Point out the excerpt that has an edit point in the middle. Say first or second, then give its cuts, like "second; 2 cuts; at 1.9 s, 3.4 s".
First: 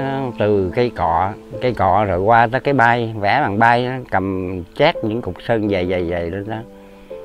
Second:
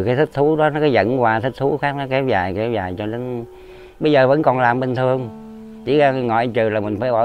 first; 1 cut; at 1.4 s